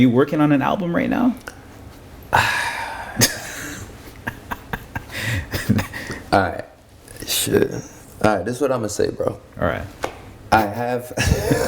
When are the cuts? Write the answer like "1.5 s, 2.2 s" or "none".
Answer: 10.3 s